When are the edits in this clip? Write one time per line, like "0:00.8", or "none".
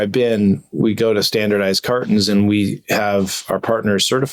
none